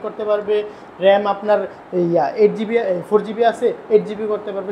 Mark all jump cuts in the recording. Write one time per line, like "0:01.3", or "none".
none